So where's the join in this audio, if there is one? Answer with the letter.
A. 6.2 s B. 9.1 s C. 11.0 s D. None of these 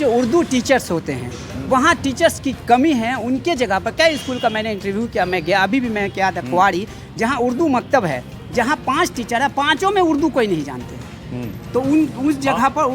D